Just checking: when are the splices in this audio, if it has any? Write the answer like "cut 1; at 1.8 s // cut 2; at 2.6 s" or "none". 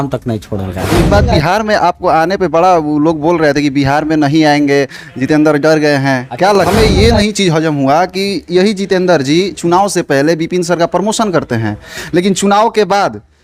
cut 1; at 1.1 s // cut 2; at 6.6 s